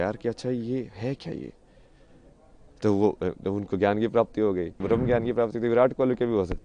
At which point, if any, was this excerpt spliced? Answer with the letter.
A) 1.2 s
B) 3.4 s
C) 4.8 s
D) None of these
C